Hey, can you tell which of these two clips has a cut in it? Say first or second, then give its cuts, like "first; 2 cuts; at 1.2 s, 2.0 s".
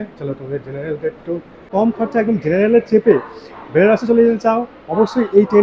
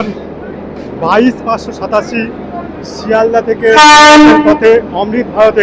first; 1 cut; at 1.7 s